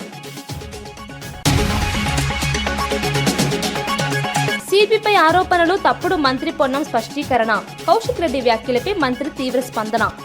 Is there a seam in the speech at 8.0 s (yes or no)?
no